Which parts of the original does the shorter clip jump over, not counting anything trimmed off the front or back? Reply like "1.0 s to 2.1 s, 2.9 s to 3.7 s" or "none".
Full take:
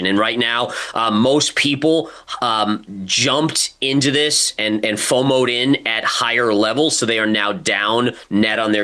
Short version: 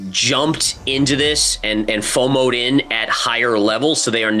none